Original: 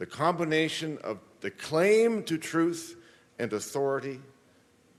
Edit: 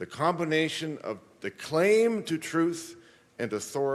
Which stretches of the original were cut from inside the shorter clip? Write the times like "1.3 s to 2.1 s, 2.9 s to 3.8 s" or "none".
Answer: none